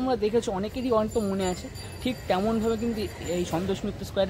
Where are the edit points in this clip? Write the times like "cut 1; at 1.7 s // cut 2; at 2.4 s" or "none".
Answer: none